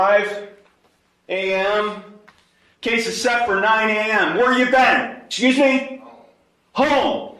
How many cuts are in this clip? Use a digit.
1